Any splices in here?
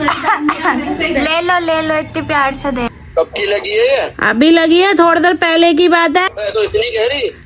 yes; 2 cuts; at 2.9 s, 6.3 s

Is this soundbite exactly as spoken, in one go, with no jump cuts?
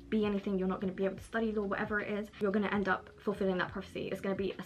no; 1 cut; at 2.4 s

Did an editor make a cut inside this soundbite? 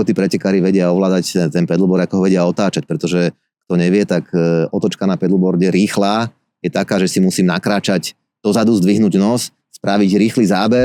no; 0 cuts

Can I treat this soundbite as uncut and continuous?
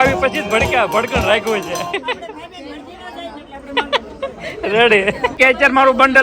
no; 1 cut; at 5.3 s

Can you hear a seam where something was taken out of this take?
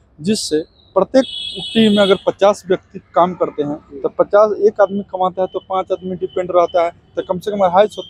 no; 0 cuts

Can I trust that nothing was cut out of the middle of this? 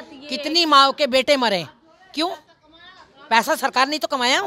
yes; 0 cuts

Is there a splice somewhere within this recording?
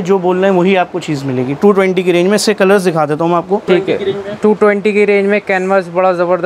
yes; 1 cut; at 3.6 s

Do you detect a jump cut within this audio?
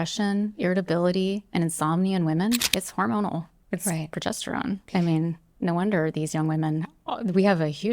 yes; 2 cuts; at 2.7 s, 4.8 s

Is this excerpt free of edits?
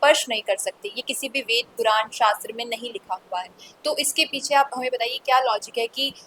yes; 0 cuts

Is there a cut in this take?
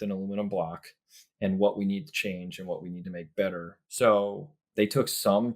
yes; 1 cut; at 3.7 s

